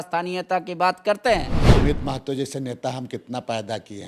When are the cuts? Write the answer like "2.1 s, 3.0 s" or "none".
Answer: 1.6 s